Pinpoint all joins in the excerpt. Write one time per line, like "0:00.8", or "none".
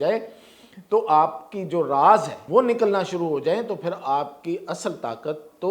0:02.4